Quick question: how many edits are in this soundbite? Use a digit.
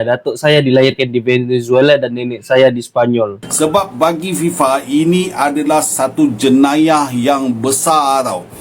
1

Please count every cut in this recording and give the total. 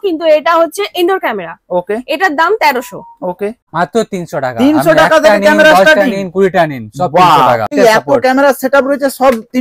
2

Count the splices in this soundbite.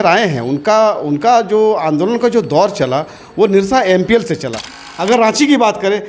1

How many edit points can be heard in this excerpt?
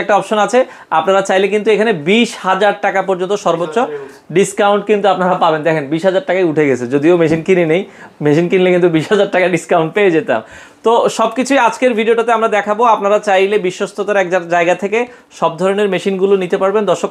0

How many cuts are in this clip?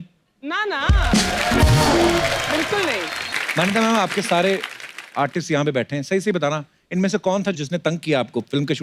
1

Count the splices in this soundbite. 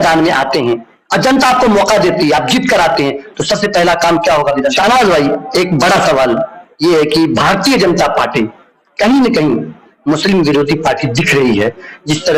1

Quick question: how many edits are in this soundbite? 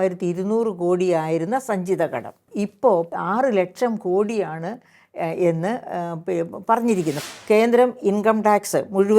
3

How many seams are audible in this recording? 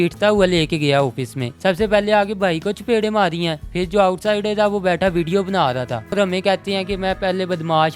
2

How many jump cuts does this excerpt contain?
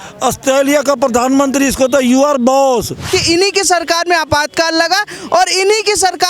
1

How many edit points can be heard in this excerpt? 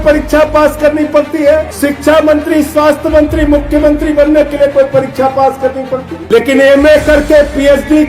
2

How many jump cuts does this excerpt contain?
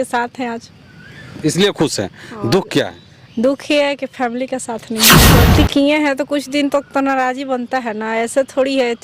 1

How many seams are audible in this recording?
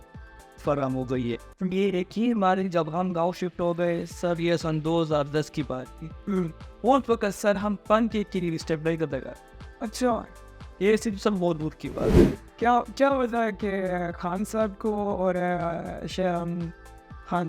2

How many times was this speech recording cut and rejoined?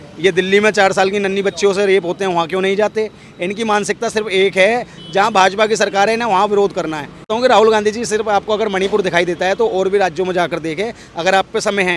1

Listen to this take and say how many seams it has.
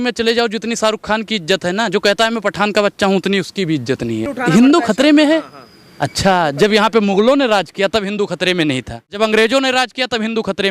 2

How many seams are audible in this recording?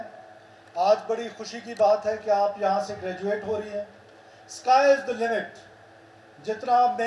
0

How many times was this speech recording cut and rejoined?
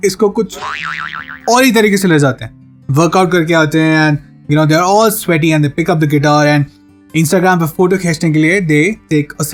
0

